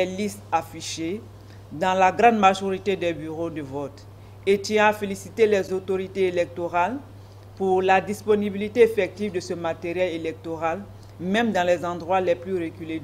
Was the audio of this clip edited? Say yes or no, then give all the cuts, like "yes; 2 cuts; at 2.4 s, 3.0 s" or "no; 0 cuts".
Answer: yes; 1 cut; at 5.8 s